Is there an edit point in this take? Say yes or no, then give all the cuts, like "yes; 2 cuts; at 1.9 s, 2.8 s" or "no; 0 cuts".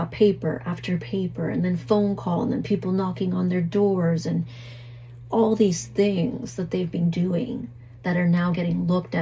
no; 0 cuts